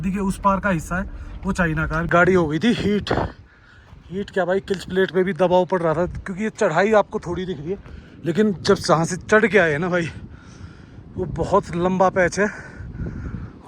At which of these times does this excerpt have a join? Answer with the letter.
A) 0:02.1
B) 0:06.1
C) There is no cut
A